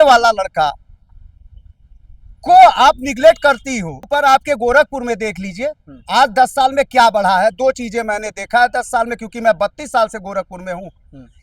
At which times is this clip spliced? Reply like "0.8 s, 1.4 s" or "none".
4.1 s